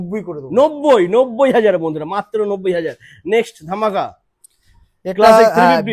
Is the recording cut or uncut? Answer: uncut